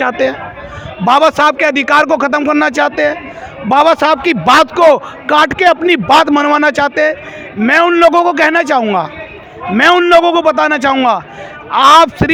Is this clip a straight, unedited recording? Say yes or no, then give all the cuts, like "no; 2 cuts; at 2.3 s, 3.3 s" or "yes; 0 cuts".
yes; 0 cuts